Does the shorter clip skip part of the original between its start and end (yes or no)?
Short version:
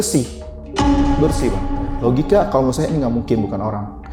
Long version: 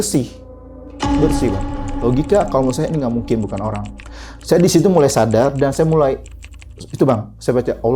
no